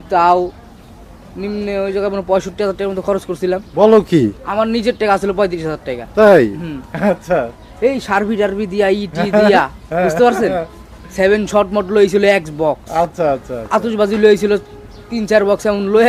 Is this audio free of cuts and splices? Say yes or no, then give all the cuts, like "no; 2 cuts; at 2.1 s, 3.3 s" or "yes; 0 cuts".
yes; 0 cuts